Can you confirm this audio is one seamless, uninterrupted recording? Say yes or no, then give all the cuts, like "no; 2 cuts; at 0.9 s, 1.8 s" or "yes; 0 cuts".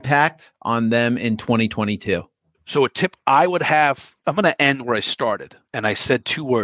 no; 2 cuts; at 2.3 s, 4.1 s